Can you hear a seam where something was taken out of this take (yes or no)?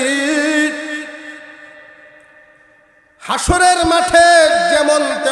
no